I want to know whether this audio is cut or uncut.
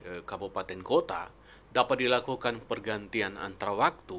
uncut